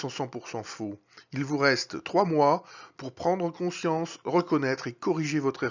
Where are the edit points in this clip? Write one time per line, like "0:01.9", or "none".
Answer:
none